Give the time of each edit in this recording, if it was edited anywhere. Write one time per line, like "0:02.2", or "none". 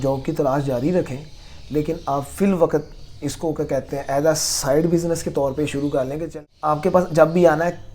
0:06.4